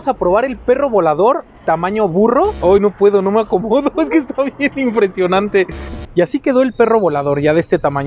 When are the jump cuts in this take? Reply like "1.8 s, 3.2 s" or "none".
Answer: 2.6 s, 6.0 s